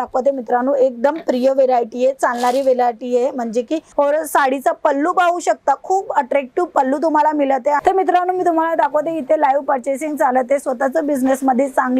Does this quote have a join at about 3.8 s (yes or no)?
yes